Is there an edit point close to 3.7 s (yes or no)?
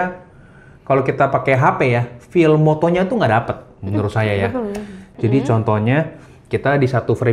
no